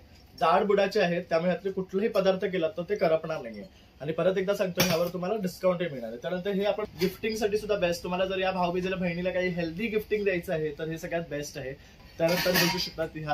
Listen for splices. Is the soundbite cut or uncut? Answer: cut